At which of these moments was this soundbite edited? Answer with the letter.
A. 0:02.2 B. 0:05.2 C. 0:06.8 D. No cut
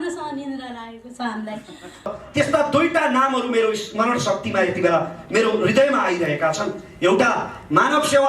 A